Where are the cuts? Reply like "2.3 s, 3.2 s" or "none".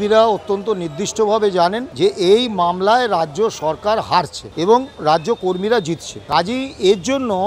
1.8 s, 4.4 s, 6.1 s